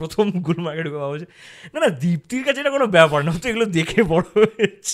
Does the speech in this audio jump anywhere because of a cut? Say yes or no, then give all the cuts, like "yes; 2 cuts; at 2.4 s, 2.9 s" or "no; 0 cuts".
no; 0 cuts